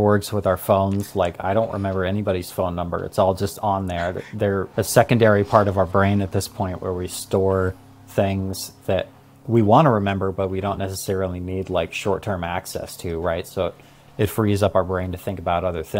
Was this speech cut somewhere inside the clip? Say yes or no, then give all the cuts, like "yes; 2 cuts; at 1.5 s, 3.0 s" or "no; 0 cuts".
no; 0 cuts